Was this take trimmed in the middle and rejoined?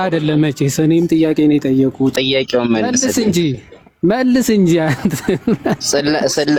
no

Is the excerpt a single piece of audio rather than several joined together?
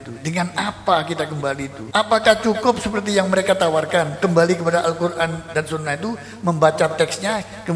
no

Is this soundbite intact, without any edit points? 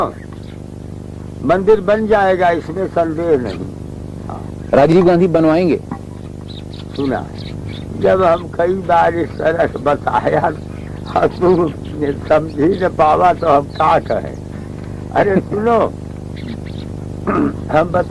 yes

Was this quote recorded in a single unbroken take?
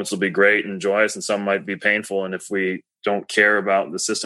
no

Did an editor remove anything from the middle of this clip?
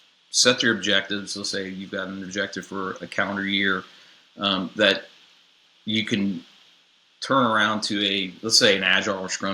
no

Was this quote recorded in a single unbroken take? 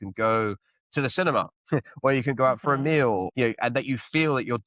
no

